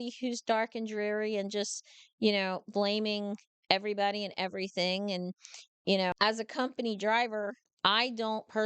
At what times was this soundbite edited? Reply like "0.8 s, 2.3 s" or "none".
6.1 s